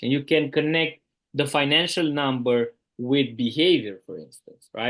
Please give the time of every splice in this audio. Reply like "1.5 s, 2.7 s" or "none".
none